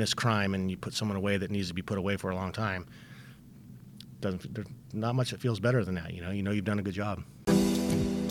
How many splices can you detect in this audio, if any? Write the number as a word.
one